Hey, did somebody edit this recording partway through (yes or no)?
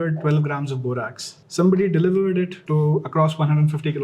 no